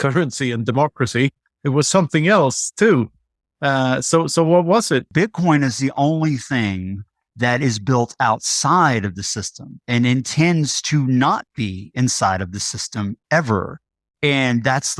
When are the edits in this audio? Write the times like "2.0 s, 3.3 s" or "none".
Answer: 5.1 s